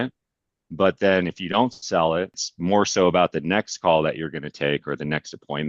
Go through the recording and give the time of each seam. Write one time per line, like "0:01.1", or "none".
0:02.4